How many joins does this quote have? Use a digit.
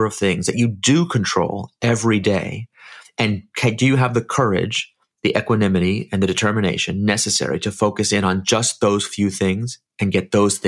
0